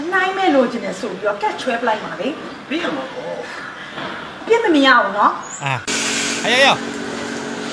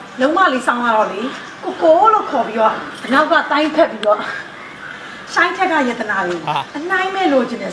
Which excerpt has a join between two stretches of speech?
first; 1 cut; at 1.9 s

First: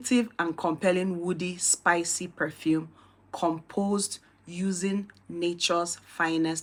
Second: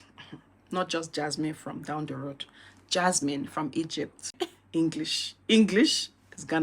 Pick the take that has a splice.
second; 1 cut; at 4.2 s

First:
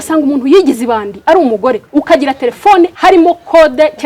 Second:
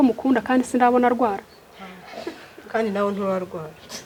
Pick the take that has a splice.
first; 2 cuts; at 1.8 s, 2.9 s

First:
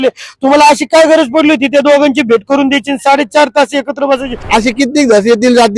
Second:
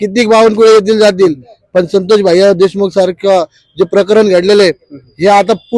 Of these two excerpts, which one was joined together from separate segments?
first; 1 cut; at 4.3 s

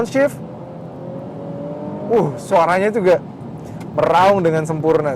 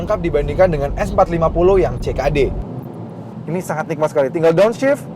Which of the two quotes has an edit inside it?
second; 1 cut; at 2.9 s

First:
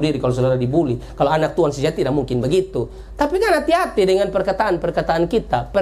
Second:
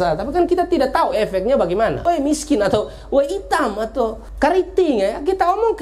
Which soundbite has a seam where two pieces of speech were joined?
second; 2 cuts; at 2.0 s, 4.2 s

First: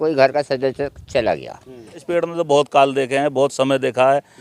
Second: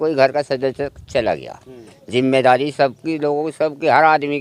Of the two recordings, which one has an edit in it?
first; 1 cut; at 2.0 s

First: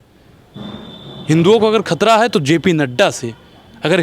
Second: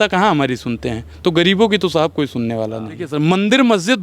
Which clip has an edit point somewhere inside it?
second; 1 cut; at 3.0 s

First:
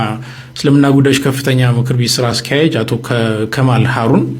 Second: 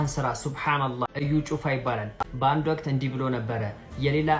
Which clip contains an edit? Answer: second; 2 cuts; at 1.1 s, 2.2 s

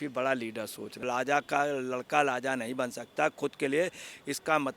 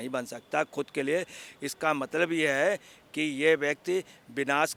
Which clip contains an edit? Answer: first; 1 cut; at 1.1 s

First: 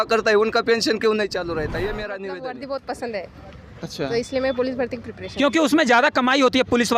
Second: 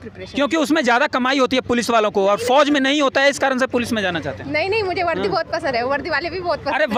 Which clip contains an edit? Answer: first; 1 cut; at 2.3 s

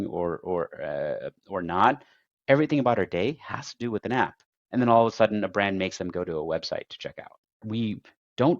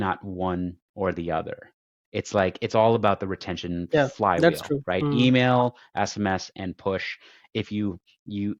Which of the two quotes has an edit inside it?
first; 1 cut; at 7.6 s

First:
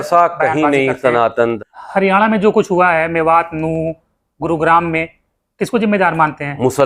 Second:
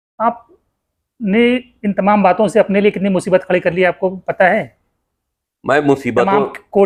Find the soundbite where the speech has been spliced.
first; 1 cut; at 1.6 s

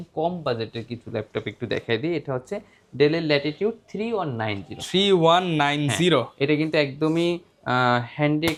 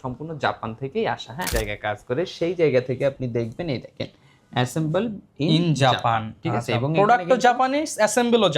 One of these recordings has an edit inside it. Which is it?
second; 1 cut; at 1.5 s

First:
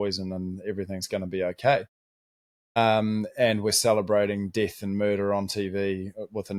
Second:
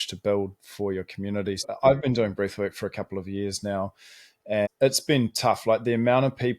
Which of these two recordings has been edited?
second; 2 cuts; at 1.6 s, 4.7 s

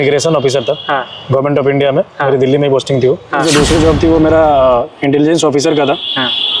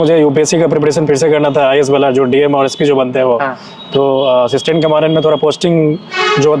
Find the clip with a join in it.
first; 1 cut; at 3.4 s

